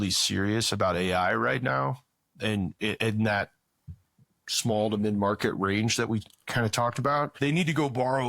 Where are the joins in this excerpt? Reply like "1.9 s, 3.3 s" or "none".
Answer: 7.3 s